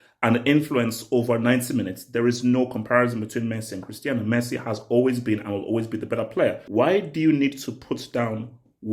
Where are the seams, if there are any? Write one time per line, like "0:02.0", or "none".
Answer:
0:06.6